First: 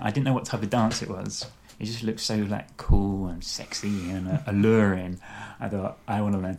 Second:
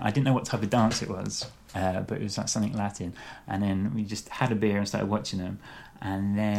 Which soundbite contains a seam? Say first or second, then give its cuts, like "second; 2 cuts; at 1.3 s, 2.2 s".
first; 1 cut; at 1.6 s